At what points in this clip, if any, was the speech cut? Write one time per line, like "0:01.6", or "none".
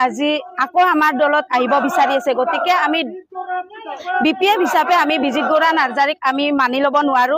none